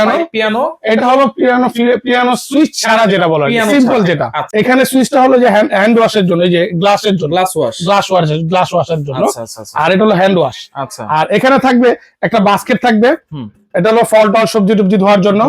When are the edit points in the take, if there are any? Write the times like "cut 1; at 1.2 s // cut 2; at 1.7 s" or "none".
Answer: cut 1; at 4.5 s